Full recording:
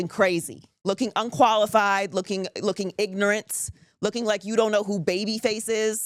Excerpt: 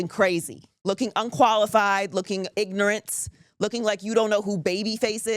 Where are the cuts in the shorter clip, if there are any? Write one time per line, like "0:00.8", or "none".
0:02.5